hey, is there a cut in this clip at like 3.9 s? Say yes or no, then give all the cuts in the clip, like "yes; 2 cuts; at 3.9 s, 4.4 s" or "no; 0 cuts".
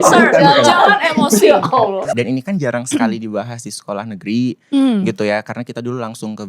no; 1 cut; at 2.1 s